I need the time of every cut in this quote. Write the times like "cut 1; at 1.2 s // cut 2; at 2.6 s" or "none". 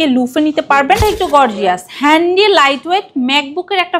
cut 1; at 1.0 s